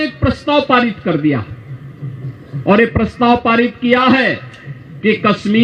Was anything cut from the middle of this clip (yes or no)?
no